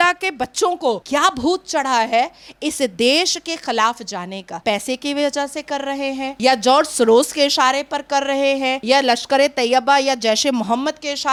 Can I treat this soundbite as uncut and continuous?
yes; 0 cuts

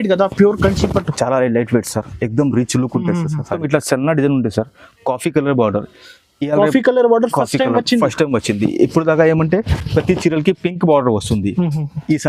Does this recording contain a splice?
yes; 1 cut; at 3.6 s

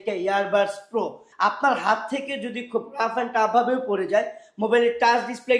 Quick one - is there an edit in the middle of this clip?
yes; 1 cut; at 1.3 s

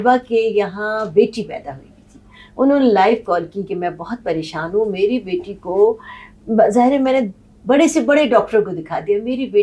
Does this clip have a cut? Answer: no; 0 cuts

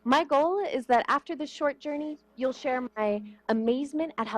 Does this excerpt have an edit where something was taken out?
yes; 1 cut; at 2.8 s

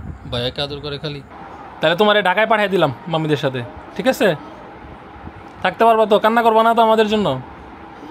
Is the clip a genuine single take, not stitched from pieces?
no; 1 cut; at 1.3 s

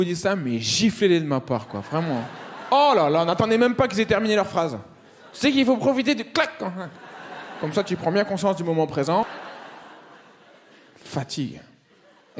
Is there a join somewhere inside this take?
no; 0 cuts

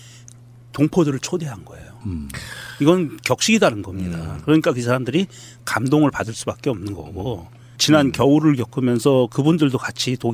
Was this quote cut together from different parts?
yes; 1 cut; at 4.3 s

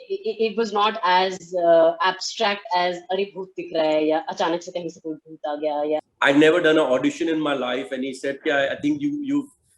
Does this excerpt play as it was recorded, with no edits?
no; 1 cut; at 6.1 s

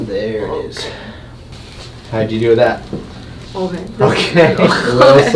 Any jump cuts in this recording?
no; 0 cuts

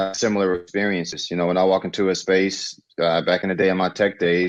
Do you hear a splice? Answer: no; 0 cuts

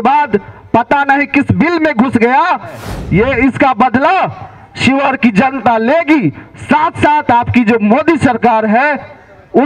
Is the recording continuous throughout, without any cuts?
no; 1 cut; at 2.9 s

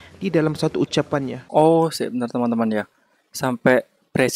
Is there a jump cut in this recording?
yes; 1 cut; at 1.4 s

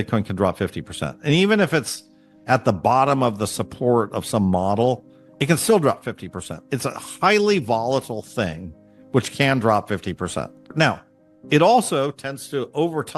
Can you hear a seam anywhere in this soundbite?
yes; 1 cut; at 10.6 s

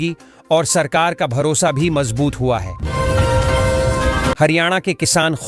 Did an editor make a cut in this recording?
yes; 2 cuts; at 2.7 s, 4.4 s

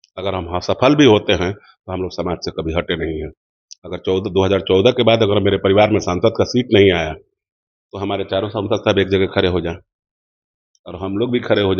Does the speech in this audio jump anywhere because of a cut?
no; 0 cuts

